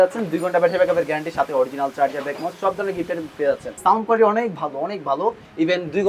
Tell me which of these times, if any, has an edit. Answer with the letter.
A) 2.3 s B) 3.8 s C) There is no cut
B